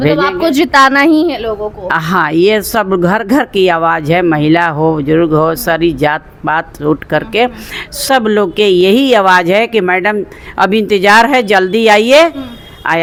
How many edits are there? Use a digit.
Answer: 0